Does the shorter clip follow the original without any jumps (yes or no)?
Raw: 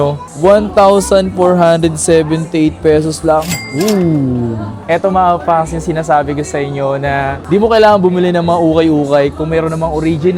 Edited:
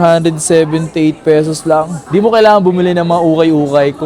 no